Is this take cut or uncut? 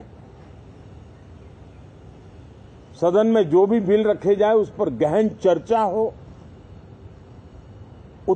uncut